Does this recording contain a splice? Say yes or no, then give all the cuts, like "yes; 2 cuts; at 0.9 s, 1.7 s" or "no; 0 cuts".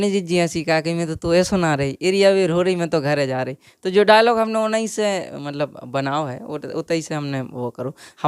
no; 0 cuts